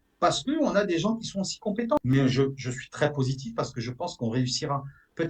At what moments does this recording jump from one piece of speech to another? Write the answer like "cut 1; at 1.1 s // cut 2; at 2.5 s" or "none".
cut 1; at 2.0 s